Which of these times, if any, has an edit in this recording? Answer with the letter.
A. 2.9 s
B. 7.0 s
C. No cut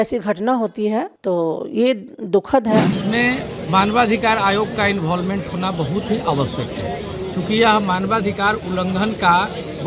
A